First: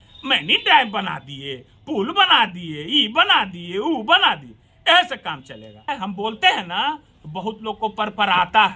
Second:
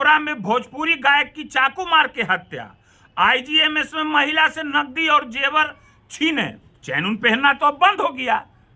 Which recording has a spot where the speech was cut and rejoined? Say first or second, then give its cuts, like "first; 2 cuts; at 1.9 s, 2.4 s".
first; 1 cut; at 5.9 s